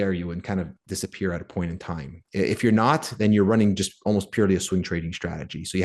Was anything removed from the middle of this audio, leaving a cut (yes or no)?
no